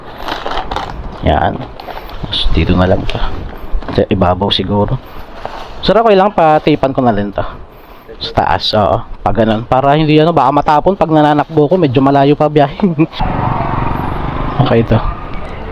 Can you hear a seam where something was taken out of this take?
yes; 1 cut; at 13.2 s

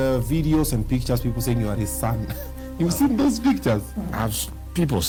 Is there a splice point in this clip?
no; 0 cuts

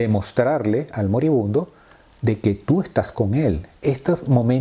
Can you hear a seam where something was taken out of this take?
yes; 1 cut; at 3.7 s

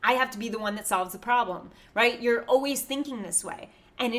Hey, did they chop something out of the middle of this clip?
no; 0 cuts

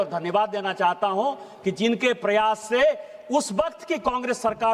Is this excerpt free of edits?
yes; 0 cuts

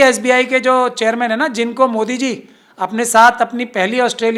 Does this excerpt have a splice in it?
no; 0 cuts

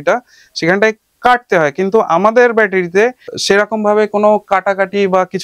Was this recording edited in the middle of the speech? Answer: yes; 1 cut; at 3.3 s

